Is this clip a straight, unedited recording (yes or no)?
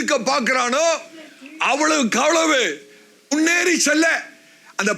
no